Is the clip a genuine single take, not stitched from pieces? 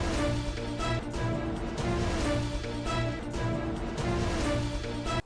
yes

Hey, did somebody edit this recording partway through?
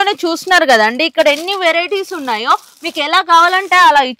no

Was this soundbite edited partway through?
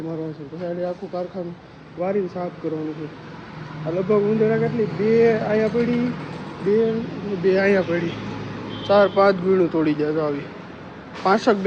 no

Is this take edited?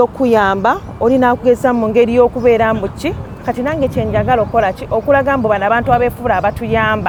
no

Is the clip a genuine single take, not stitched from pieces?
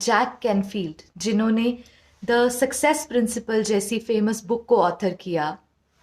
yes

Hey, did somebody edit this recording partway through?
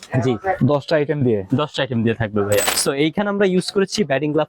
yes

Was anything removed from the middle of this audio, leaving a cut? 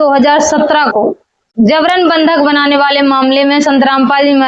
yes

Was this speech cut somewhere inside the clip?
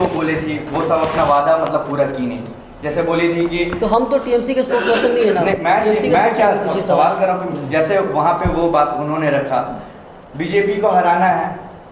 no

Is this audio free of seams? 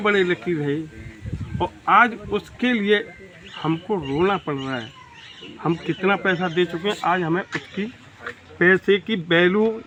yes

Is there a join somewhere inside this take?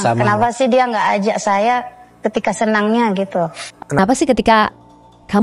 yes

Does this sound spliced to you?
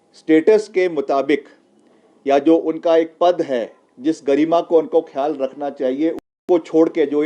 yes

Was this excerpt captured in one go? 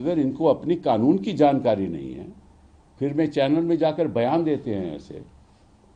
yes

